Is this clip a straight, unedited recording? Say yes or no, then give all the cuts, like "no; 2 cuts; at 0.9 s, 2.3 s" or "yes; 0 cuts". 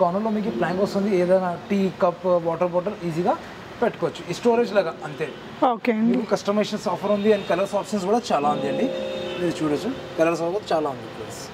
yes; 0 cuts